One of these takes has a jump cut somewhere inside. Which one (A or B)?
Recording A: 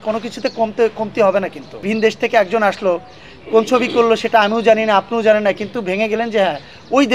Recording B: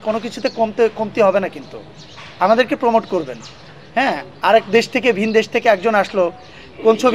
A